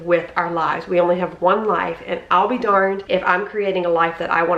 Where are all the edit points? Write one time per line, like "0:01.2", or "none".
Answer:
0:03.0